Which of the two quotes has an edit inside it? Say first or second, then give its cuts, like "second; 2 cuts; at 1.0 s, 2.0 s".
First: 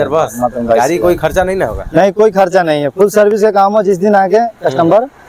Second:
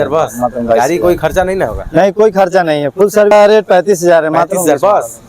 second; 1 cut; at 3.3 s